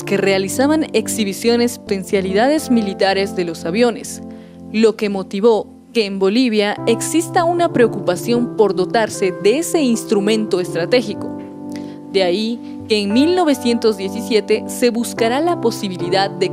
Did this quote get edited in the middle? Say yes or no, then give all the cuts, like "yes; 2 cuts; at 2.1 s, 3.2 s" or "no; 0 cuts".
no; 0 cuts